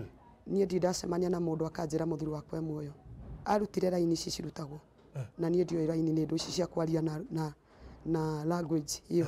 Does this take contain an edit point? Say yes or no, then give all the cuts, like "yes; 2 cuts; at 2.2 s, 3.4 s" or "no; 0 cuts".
yes; 1 cut; at 3.3 s